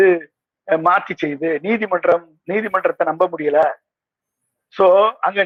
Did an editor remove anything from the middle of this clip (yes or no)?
no